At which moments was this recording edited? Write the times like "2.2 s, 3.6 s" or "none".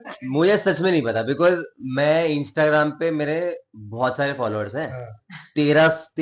none